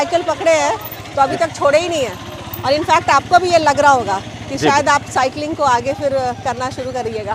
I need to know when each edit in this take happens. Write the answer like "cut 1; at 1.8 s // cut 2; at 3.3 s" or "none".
none